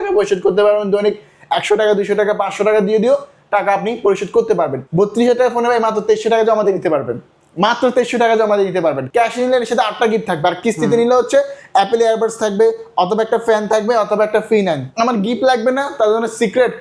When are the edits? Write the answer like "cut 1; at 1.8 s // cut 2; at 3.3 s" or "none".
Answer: cut 1; at 4.8 s // cut 2; at 9.0 s // cut 3; at 14.9 s

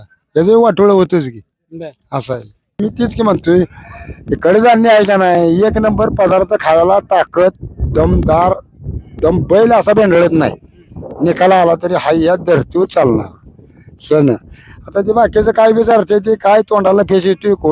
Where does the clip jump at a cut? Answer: cut 1; at 2.8 s

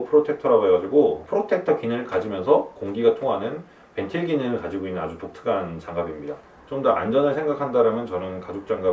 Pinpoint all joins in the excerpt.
cut 1; at 6.3 s

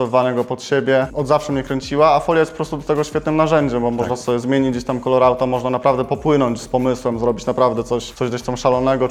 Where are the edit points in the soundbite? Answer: none

